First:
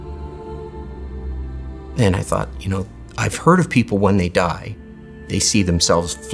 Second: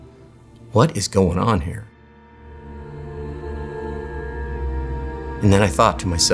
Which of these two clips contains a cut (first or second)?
second